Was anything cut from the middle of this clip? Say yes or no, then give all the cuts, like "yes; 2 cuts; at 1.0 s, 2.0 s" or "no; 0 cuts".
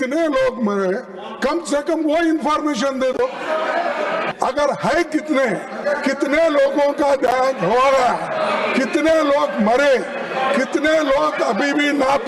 yes; 1 cut; at 4.3 s